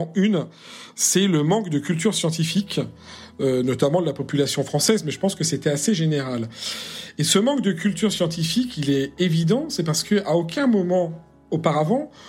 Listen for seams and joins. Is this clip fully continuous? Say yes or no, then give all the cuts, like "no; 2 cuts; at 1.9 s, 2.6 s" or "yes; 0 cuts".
yes; 0 cuts